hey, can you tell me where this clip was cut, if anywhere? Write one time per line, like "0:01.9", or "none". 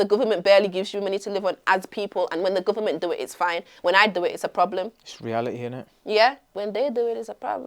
0:06.5

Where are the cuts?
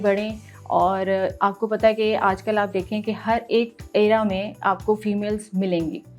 none

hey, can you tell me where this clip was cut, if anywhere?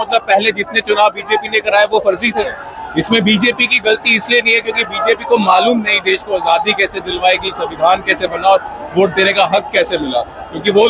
0:02.7

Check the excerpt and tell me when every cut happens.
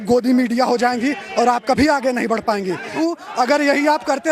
0:03.0

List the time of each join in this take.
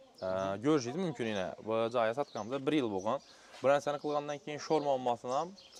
none

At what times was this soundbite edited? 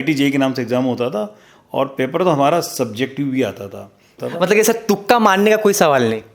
0:04.2

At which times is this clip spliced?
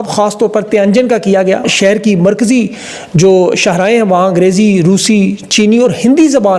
0:01.7

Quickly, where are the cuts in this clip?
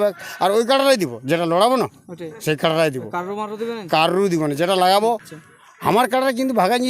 0:05.3

